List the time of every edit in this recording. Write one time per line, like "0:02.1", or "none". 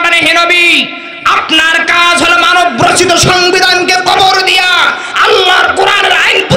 none